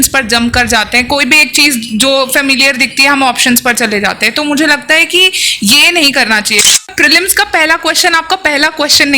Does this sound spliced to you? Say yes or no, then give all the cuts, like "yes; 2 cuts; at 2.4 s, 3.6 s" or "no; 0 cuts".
yes; 1 cut; at 6.7 s